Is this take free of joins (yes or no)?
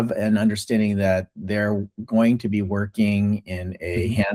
yes